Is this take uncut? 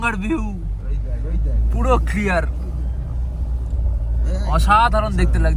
yes; 0 cuts

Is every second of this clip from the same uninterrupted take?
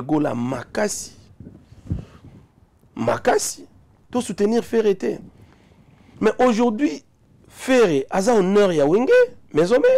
no; 1 cut; at 4.0 s

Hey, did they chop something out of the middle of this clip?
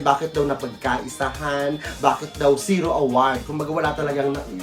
no; 0 cuts

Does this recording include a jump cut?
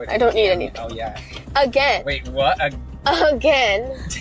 no; 0 cuts

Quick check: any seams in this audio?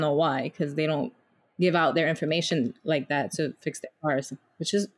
no; 0 cuts

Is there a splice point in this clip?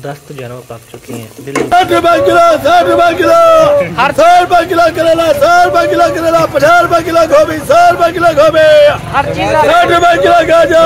yes; 1 cut; at 1.7 s

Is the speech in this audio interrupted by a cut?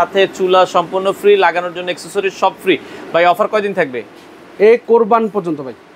no; 0 cuts

